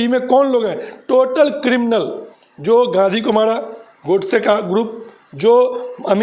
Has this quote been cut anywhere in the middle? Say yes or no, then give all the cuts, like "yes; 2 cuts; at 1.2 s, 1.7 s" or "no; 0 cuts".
no; 0 cuts